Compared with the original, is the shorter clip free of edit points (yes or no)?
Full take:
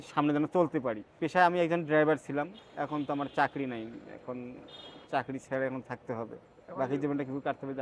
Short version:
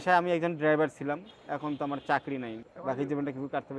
no